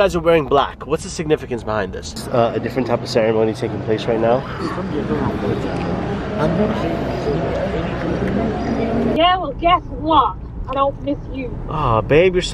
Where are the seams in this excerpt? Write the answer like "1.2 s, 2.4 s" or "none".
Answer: 2.2 s, 9.2 s